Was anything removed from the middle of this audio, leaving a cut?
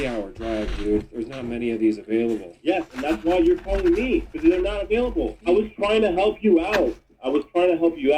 yes; 2 cuts; at 2.6 s, 5.4 s

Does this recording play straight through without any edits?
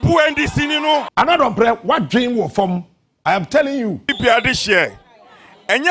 no; 2 cuts; at 1.1 s, 4.1 s

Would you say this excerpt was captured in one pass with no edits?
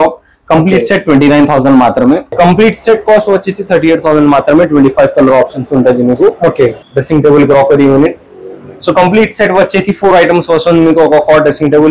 no; 2 cuts; at 2.3 s, 6.8 s

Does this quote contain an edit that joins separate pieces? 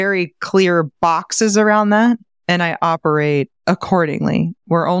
yes; 2 cuts; at 2.3 s, 3.5 s

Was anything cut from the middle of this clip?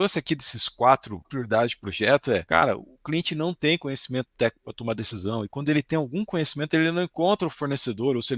yes; 2 cuts; at 1.3 s, 2.4 s

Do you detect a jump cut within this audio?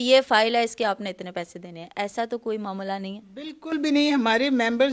no; 0 cuts

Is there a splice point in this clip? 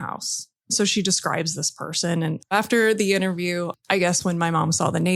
yes; 1 cut; at 2.5 s

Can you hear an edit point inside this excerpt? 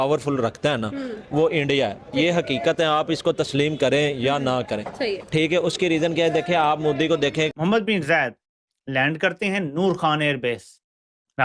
yes; 1 cut; at 7.5 s

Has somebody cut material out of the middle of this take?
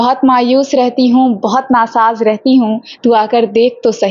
no; 0 cuts

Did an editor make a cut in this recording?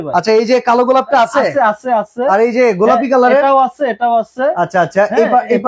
no; 0 cuts

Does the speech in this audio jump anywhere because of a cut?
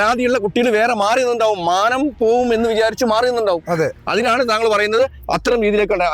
no; 0 cuts

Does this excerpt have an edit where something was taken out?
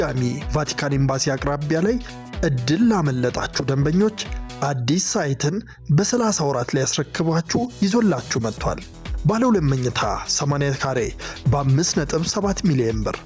no; 0 cuts

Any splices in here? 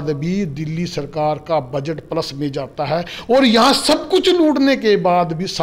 no; 0 cuts

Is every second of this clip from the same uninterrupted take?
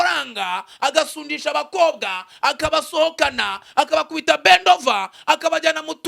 yes; 0 cuts

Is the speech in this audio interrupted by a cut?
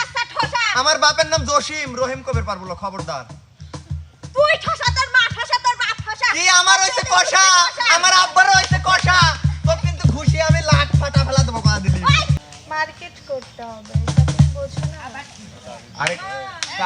yes; 1 cut; at 12.4 s

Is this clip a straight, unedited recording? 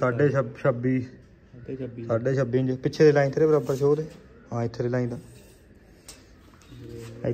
yes; 0 cuts

